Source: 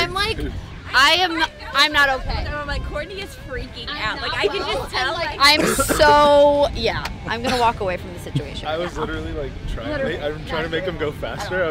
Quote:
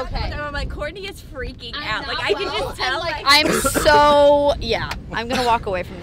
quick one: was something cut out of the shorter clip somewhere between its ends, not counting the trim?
no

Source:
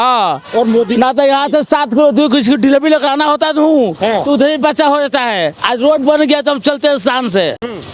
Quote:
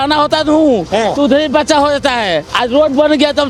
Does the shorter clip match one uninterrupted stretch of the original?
yes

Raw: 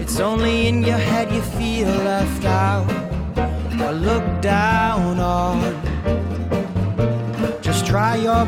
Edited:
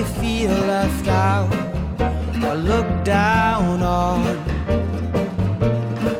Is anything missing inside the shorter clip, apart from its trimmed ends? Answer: no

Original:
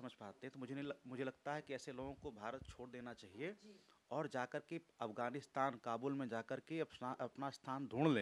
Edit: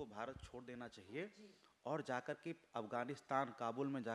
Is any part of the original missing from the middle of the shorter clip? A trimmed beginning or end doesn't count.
no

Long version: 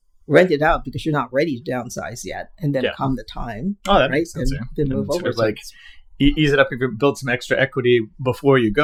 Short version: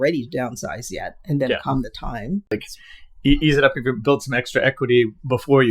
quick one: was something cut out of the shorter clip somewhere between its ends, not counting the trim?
yes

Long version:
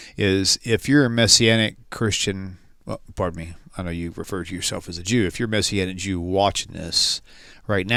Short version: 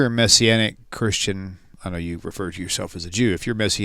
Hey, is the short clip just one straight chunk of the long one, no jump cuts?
no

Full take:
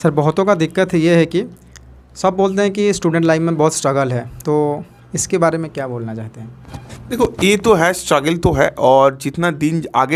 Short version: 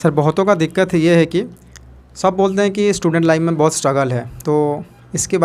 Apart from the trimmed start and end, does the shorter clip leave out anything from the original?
no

